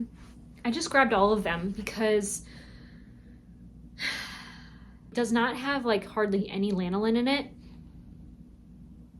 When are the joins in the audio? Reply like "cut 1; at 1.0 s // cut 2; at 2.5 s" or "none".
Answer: cut 1; at 5.1 s